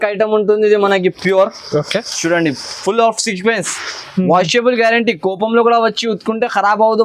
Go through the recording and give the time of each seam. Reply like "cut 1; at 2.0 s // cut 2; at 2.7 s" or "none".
none